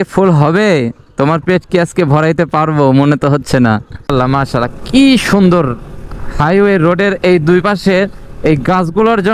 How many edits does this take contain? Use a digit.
1